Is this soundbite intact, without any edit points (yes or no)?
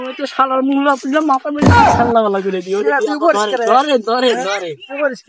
yes